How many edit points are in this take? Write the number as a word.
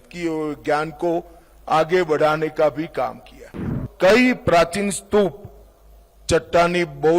one